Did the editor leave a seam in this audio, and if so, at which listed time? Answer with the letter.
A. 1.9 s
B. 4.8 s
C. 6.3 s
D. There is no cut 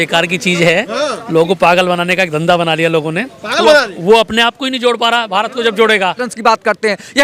C